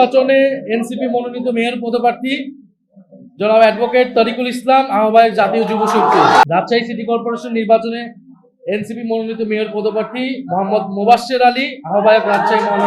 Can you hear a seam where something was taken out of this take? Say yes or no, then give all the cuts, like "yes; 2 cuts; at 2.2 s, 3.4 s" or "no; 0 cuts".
yes; 1 cut; at 6.4 s